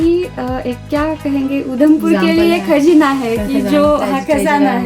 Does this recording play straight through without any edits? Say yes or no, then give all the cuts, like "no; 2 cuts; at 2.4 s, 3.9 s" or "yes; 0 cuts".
yes; 0 cuts